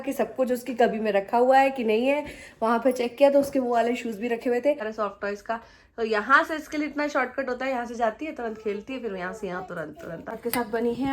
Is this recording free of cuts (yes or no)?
no